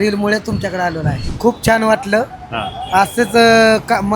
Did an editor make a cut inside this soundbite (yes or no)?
yes